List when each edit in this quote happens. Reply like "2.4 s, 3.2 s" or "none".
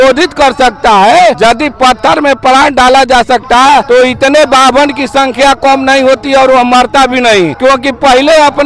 1.4 s, 3.8 s, 7.5 s